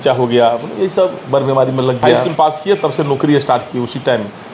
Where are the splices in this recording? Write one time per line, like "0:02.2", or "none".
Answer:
0:02.2